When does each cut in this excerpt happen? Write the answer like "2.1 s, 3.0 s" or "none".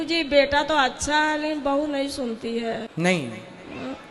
2.9 s